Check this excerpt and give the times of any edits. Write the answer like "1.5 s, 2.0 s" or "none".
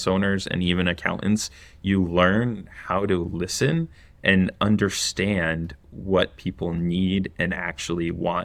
none